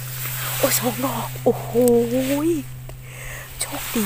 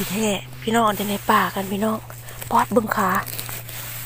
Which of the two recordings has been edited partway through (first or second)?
second